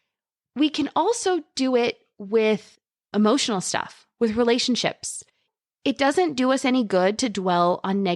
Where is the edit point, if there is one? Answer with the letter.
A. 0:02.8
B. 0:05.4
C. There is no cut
B